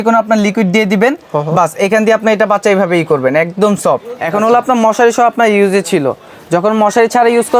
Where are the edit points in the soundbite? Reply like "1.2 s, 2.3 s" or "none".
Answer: 4.1 s